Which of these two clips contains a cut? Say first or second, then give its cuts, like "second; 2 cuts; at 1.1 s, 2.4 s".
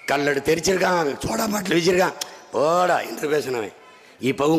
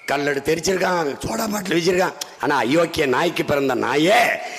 second; 1 cut; at 2.3 s